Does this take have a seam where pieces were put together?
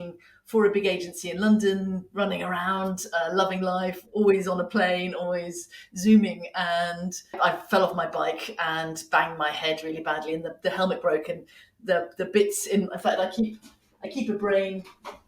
yes; 1 cut; at 7.3 s

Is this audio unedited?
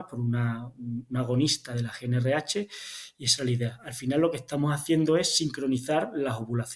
yes; 0 cuts

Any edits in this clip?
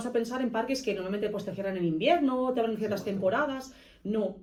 no; 0 cuts

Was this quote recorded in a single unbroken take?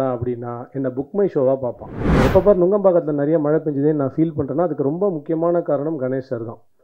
no; 1 cut; at 2.2 s

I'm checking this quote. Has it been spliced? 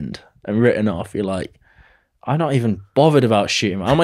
no; 0 cuts

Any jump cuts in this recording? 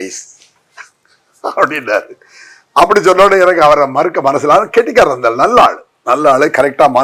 no; 0 cuts

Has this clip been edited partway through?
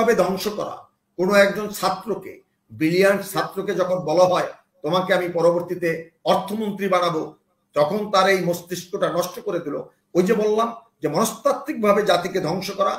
no; 0 cuts

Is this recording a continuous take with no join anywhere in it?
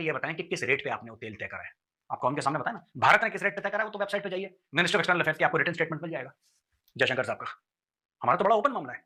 yes; 0 cuts

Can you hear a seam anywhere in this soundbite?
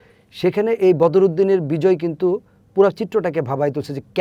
no; 0 cuts

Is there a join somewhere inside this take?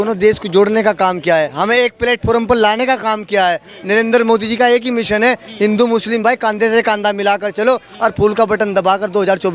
no; 0 cuts

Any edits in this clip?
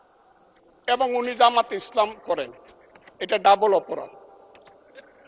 no; 0 cuts

